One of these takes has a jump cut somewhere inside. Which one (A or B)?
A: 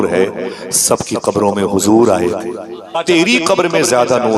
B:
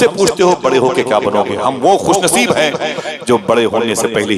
A